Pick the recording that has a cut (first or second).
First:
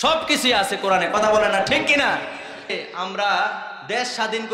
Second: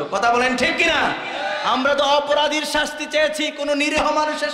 first